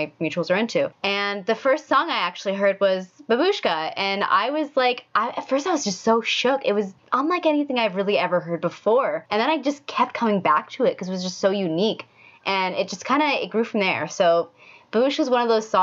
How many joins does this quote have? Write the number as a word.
three